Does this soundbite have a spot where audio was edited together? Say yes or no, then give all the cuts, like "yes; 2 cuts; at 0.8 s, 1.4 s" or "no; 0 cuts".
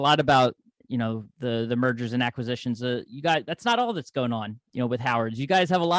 yes; 1 cut; at 4.6 s